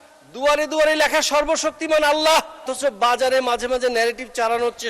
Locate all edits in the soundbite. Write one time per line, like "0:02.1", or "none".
0:02.7